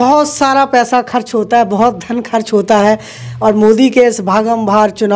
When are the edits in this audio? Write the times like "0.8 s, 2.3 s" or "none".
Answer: none